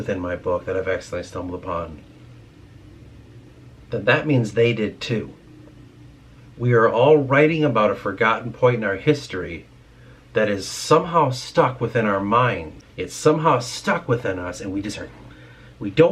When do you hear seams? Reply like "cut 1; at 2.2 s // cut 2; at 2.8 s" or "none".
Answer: cut 1; at 12.7 s

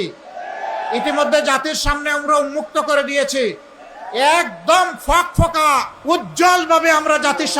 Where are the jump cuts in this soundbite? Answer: cut 1; at 5.9 s

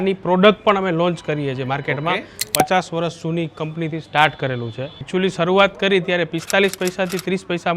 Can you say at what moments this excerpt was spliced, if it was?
cut 1; at 2.4 s // cut 2; at 4.9 s

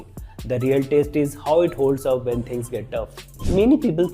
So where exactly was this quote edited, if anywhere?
cut 1; at 3.1 s

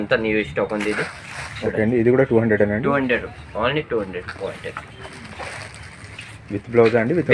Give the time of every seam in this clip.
cut 1; at 4.4 s

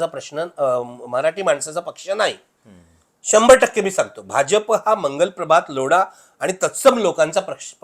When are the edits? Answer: none

